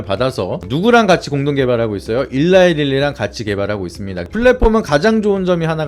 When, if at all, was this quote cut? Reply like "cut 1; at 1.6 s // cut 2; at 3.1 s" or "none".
cut 1; at 4.3 s